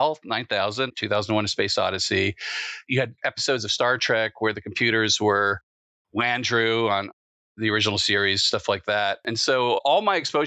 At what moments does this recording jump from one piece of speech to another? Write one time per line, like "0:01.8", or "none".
0:00.9
0:02.9